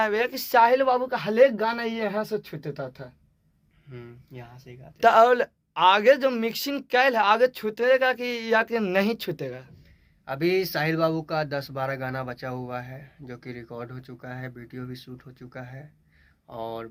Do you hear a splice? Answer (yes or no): no